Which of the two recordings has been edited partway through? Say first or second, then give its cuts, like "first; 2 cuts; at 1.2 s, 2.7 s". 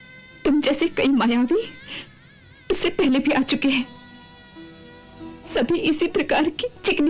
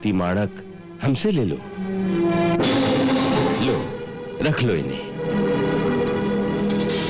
second; 1 cut; at 3.6 s